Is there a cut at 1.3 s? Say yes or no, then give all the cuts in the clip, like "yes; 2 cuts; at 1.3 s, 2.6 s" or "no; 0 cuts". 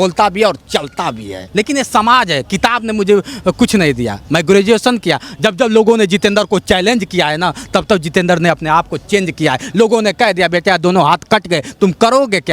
yes; 1 cut; at 1.3 s